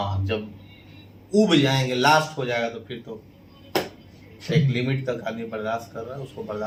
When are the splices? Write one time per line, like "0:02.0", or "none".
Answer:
none